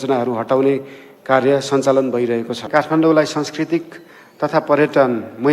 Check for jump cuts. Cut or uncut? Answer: cut